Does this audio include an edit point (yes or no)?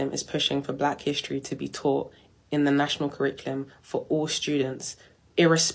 no